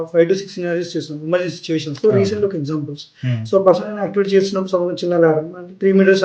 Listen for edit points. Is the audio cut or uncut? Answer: cut